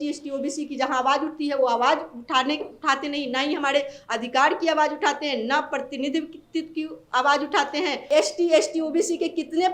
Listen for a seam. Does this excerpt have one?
yes; 1 cut; at 8.0 s

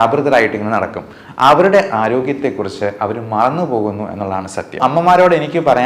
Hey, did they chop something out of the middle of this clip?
yes; 1 cut; at 4.8 s

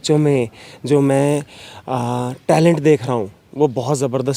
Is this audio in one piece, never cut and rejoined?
yes; 0 cuts

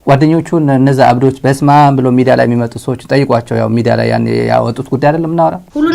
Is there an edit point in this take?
no; 0 cuts

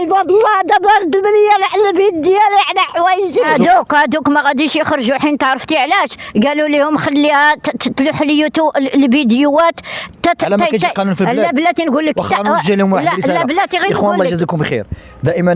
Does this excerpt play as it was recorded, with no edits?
no; 1 cut; at 3.5 s

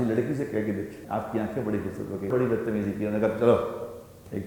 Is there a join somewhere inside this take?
yes; 2 cuts; at 1.0 s, 2.3 s

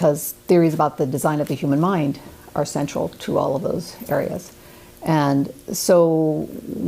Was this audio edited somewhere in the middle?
yes; 1 cut; at 1.3 s

